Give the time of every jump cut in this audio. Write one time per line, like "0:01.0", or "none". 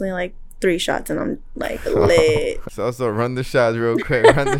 0:02.6